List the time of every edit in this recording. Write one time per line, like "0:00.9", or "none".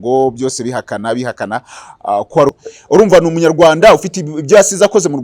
0:02.7